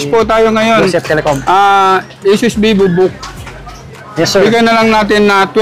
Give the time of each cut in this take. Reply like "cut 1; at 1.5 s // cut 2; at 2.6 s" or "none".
none